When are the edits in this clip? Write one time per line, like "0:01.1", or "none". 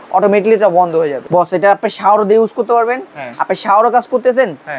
0:01.2